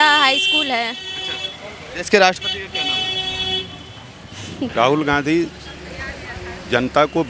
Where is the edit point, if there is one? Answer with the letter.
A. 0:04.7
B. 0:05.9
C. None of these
A